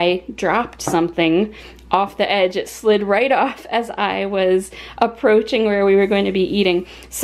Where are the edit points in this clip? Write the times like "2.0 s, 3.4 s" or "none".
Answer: none